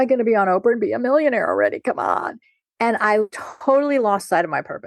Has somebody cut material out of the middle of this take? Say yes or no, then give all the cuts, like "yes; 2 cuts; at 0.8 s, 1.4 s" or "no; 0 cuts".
yes; 1 cut; at 3.4 s